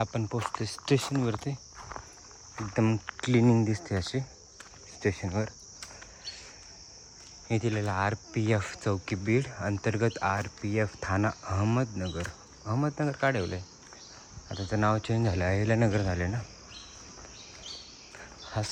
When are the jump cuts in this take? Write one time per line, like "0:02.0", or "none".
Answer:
none